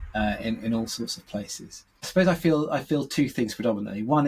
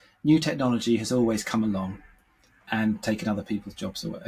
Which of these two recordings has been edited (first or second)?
first